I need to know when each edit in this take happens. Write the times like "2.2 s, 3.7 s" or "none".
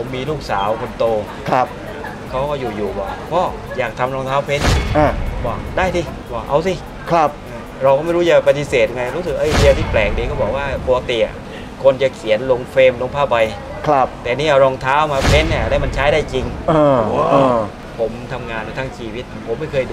6.2 s, 17.8 s